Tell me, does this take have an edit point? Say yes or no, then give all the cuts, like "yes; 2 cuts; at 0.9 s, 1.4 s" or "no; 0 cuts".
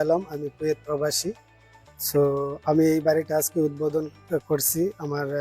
no; 0 cuts